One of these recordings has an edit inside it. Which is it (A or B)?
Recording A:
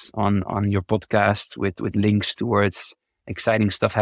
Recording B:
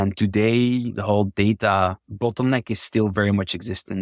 B